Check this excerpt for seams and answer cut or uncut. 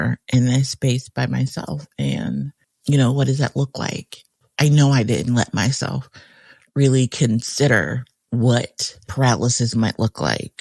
cut